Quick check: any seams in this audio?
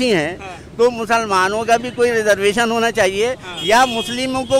no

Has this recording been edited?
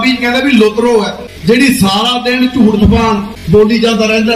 yes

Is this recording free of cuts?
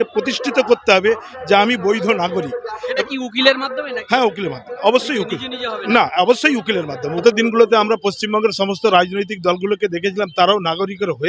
no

